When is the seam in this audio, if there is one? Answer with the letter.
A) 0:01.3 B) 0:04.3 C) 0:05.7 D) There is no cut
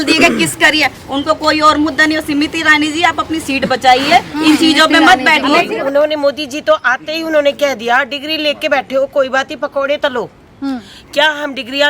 C